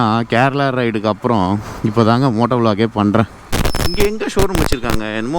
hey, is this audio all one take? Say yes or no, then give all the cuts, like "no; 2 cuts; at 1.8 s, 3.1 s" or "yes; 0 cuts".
no; 1 cut; at 3.4 s